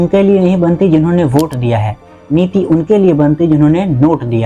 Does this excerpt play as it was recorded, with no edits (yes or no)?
yes